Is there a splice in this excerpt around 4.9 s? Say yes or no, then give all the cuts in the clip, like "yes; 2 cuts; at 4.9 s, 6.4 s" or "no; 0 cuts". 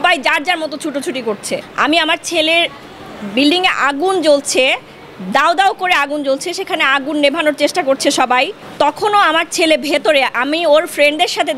no; 2 cuts; at 1.6 s, 8.6 s